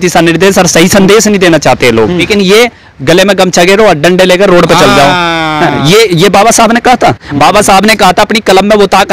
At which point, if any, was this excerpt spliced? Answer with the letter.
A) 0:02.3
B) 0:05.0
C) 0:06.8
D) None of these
A